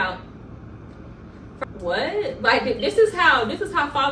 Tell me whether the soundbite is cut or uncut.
cut